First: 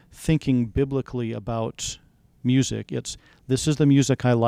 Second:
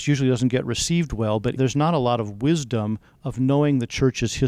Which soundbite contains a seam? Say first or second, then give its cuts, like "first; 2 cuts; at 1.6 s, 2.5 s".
second; 1 cut; at 1.5 s